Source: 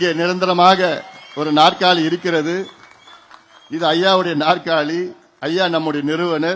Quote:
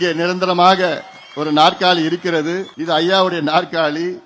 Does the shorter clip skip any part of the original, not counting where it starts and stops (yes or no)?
yes